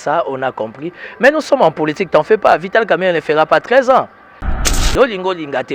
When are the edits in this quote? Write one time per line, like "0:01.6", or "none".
0:04.6